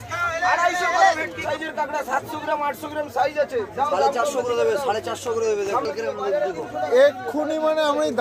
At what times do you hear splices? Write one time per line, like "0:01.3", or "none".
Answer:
0:01.4